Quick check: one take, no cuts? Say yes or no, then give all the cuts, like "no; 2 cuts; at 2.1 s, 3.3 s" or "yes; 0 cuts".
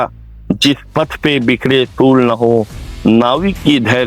yes; 0 cuts